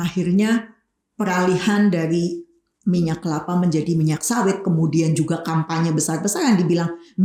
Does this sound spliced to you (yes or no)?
no